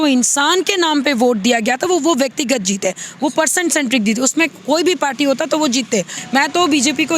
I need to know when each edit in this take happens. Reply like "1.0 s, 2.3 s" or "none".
6.2 s